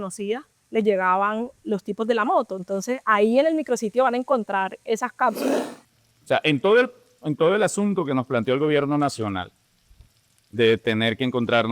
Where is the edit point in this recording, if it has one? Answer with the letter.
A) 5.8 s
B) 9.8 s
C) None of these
A